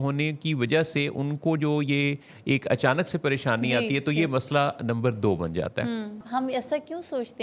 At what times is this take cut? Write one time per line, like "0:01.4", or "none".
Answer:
0:06.2